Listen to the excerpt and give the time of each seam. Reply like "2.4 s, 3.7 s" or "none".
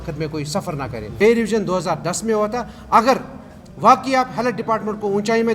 1.2 s